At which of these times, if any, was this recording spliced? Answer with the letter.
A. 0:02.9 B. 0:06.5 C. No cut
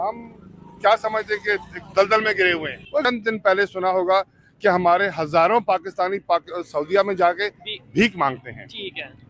A